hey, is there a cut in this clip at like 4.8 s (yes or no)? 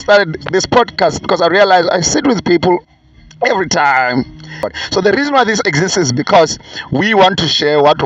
yes